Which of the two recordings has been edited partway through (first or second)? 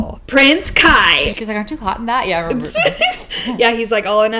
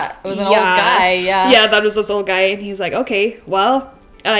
first